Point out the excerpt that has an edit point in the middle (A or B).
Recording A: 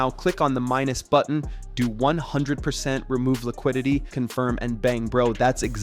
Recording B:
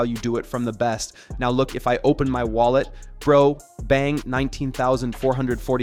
A